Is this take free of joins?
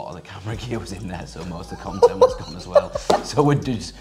yes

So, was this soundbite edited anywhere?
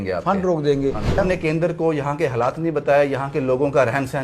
yes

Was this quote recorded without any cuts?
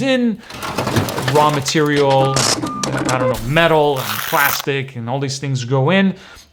yes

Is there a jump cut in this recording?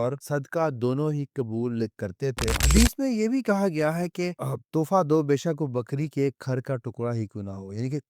yes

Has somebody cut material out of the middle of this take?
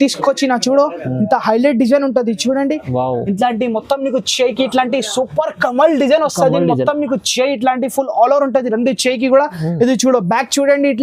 no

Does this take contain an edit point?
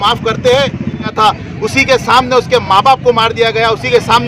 yes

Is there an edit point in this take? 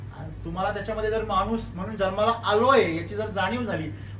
no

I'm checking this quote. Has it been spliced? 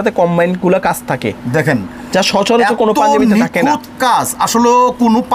no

